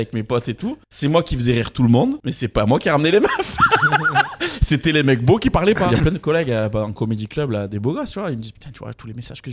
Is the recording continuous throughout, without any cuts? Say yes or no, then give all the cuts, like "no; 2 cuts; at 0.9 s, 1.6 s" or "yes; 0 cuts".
no; 3 cuts; at 0.9 s, 2.3 s, 5.9 s